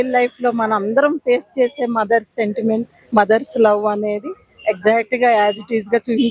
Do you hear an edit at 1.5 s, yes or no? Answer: no